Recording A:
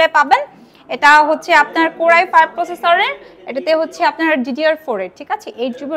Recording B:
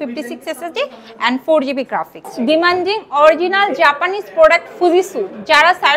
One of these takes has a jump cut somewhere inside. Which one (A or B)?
B